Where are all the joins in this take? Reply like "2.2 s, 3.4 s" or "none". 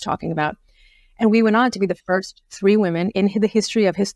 3.1 s